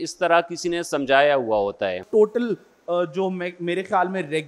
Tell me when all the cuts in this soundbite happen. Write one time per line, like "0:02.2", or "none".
0:02.0